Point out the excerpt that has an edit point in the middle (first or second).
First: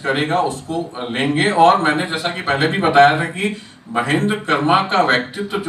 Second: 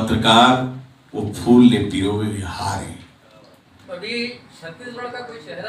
second